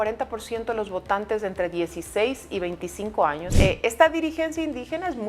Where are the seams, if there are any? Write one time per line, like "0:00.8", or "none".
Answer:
0:03.5